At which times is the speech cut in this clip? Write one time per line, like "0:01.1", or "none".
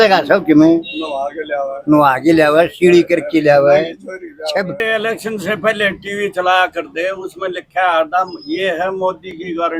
0:04.8